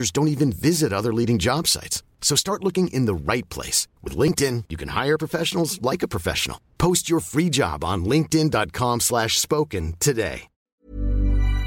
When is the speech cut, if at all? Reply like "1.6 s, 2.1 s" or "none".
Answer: 10.7 s